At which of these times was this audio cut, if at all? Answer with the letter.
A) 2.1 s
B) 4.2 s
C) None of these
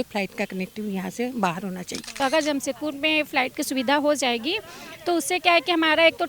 A